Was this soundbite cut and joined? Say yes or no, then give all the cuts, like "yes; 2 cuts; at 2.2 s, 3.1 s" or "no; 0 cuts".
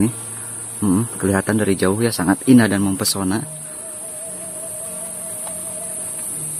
no; 0 cuts